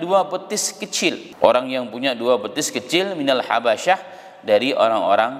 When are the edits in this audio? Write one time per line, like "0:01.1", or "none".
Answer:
0:01.3